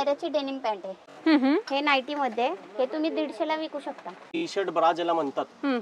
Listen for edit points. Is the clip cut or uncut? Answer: cut